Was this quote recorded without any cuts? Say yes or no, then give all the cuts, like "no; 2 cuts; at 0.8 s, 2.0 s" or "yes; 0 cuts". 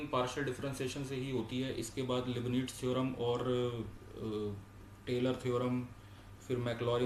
yes; 0 cuts